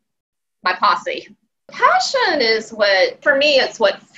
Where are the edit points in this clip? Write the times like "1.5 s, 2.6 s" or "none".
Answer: 1.7 s, 3.2 s